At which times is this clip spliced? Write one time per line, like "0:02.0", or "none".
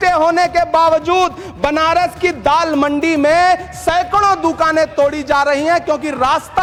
none